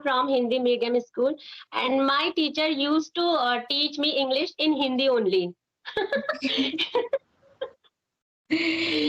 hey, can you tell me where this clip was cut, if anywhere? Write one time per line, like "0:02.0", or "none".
none